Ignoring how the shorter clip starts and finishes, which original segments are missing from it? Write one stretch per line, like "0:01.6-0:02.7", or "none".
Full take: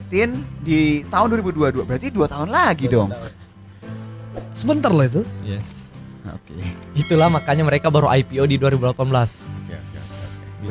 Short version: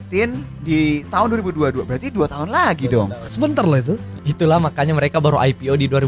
0:03.2-0:04.5
0:05.4-0:06.8

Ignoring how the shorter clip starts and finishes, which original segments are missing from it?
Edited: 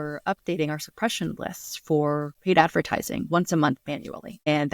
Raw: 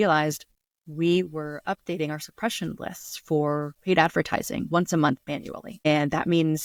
none

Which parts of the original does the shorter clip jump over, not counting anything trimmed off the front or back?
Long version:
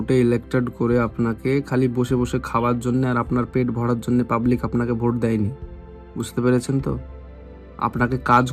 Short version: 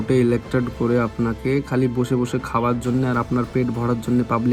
none

